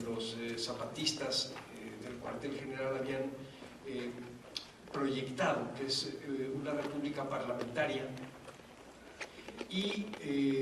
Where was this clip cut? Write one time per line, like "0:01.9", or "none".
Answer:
0:08.2